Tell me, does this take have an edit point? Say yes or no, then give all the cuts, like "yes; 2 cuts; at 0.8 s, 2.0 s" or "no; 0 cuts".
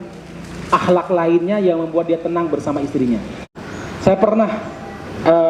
yes; 1 cut; at 3.6 s